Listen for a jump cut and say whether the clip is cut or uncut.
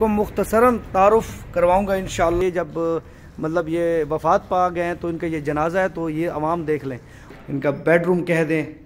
cut